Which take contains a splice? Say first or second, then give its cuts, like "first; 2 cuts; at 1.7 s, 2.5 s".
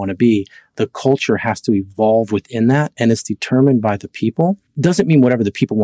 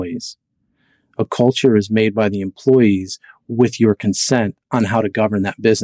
first; 1 cut; at 4.7 s